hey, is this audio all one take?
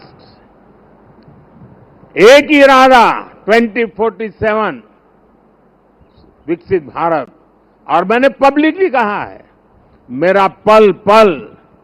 yes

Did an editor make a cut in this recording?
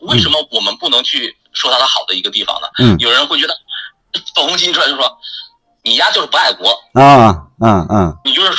no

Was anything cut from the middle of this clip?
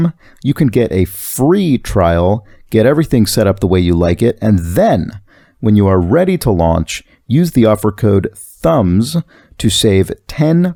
no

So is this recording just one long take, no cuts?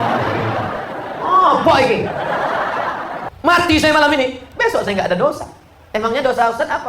no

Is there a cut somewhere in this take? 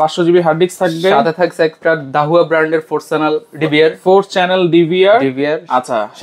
no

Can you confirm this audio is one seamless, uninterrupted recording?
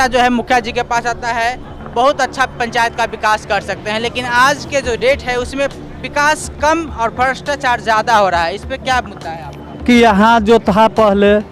no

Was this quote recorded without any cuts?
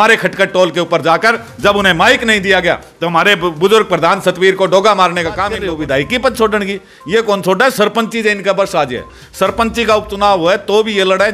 no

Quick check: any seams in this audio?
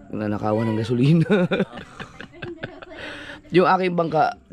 no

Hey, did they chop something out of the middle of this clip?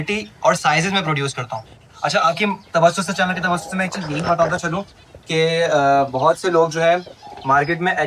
no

